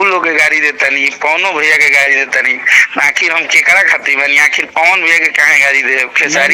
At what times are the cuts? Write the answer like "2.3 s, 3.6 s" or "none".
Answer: none